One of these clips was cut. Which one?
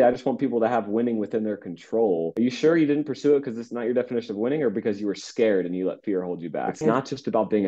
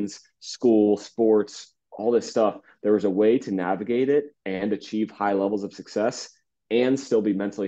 first; 2 cuts; at 2.3 s, 6.7 s

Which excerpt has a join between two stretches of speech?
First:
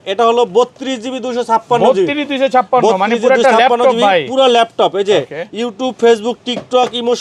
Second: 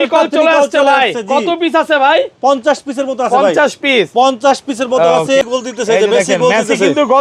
second; 1 cut; at 5.4 s

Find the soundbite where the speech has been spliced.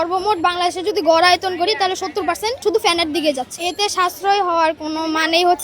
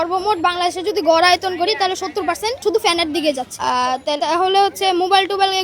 first; 1 cut; at 3.5 s

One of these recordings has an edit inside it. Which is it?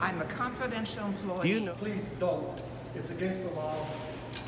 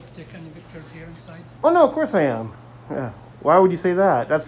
first; 1 cut; at 1.5 s

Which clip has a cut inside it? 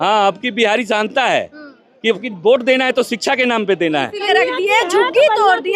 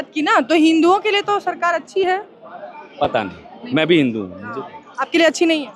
first; 1 cut; at 4.2 s

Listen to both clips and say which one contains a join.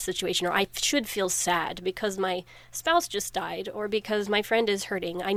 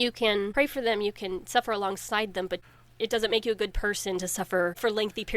second; 1 cut; at 2.7 s

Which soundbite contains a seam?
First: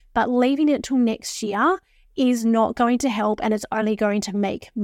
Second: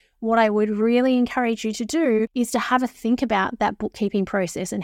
second; 1 cut; at 2.3 s

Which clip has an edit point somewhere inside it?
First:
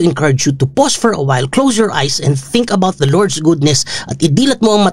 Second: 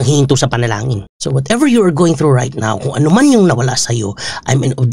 second; 1 cut; at 1.0 s

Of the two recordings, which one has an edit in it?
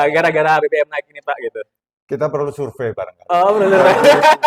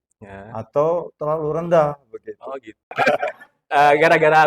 second; 1 cut; at 2.9 s

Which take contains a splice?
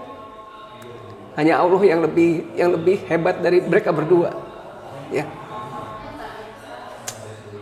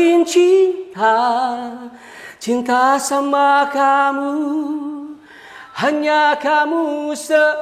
first; 1 cut; at 6.0 s

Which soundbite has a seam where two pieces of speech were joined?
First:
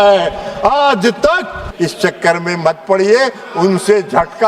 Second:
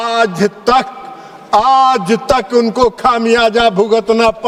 first; 1 cut; at 1.6 s

